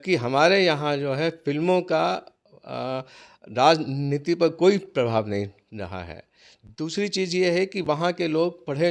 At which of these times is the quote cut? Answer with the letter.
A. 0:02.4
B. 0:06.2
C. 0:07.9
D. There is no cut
D